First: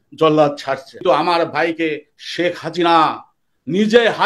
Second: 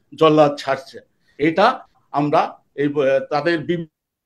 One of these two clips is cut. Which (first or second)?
first